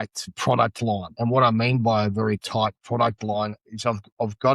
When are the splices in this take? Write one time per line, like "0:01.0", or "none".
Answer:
0:01.1